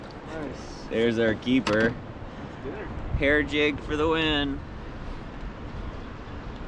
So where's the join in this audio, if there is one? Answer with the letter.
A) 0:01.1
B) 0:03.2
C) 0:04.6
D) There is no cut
C